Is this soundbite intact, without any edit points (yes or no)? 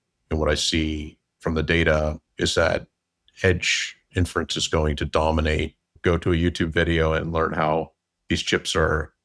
no